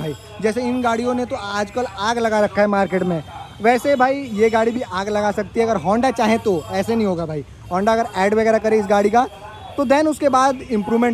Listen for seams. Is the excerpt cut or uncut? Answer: uncut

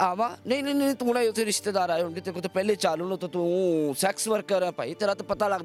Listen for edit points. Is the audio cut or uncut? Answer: uncut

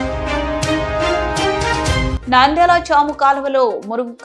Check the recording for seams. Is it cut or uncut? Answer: cut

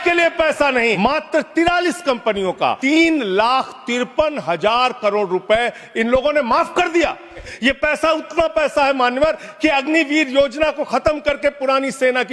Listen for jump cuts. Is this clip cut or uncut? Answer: cut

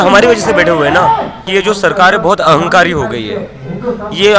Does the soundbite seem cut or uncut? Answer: cut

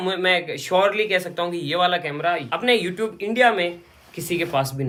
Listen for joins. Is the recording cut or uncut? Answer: uncut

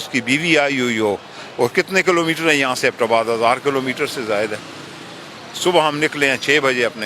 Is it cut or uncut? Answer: uncut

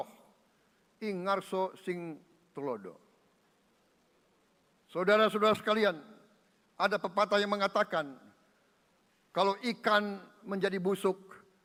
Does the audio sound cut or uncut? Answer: uncut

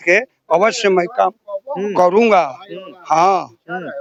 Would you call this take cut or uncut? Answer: uncut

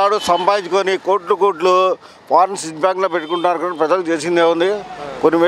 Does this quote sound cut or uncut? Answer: uncut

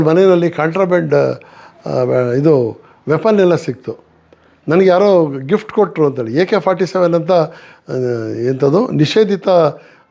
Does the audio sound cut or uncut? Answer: uncut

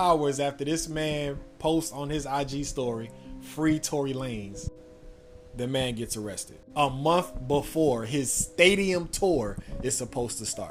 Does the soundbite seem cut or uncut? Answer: uncut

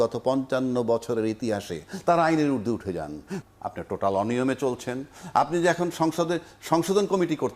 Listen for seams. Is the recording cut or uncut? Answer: cut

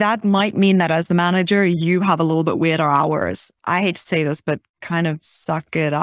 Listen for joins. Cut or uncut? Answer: cut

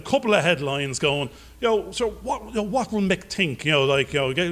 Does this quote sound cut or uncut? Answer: uncut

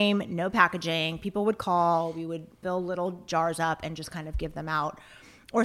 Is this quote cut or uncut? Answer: cut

